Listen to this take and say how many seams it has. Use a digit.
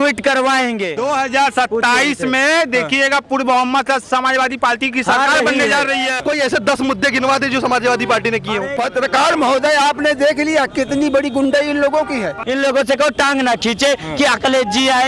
4